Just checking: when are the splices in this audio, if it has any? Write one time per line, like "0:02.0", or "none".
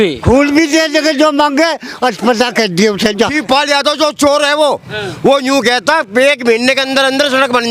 0:03.4